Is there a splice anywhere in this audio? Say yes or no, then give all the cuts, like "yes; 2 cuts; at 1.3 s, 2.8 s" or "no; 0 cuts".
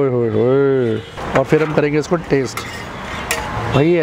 yes; 1 cut; at 1.2 s